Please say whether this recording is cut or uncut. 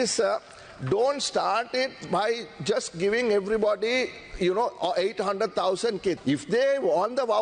cut